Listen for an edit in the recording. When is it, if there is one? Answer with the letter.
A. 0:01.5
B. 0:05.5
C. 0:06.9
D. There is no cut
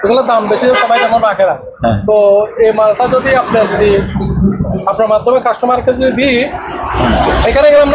D